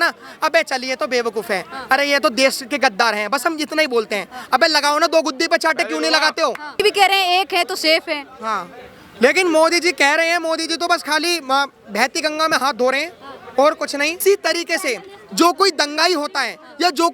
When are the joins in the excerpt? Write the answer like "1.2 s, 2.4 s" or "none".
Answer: 6.8 s, 14.2 s